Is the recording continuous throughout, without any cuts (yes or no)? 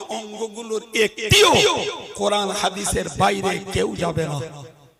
yes